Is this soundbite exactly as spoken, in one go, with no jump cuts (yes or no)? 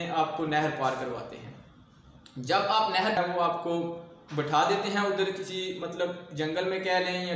no